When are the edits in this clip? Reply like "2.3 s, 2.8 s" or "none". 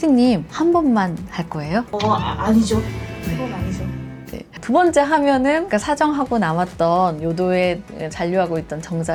none